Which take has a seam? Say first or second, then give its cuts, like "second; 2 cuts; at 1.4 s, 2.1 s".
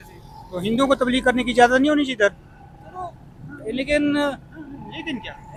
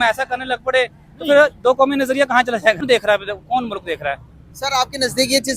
second; 1 cut; at 2.8 s